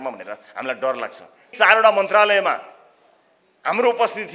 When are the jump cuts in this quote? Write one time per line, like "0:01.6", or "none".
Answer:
0:01.5